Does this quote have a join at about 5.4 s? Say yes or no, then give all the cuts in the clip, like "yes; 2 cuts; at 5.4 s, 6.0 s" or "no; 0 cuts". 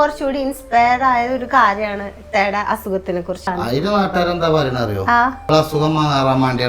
yes; 2 cuts; at 3.5 s, 5.4 s